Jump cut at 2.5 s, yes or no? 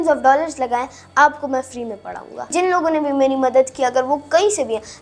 yes